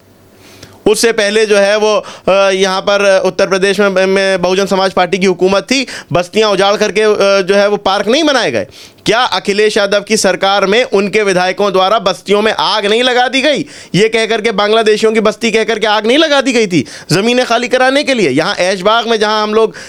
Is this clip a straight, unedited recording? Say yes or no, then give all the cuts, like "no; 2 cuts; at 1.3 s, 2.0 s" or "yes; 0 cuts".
yes; 0 cuts